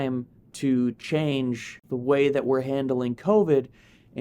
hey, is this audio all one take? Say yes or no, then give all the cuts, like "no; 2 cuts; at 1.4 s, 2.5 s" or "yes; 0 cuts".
no; 1 cut; at 1.8 s